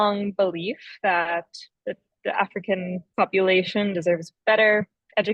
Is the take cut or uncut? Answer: cut